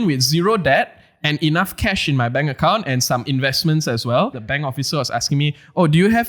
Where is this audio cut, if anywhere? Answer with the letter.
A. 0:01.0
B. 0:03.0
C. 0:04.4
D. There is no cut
C